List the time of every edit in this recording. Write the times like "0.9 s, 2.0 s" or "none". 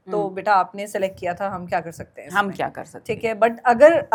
none